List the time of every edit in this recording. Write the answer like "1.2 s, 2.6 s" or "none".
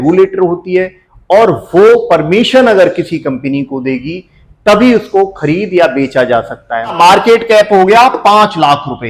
6.8 s